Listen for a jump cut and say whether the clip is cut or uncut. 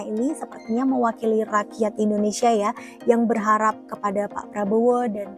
uncut